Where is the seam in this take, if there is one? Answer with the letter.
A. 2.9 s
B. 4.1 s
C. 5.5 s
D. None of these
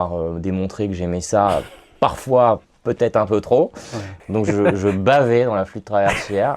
B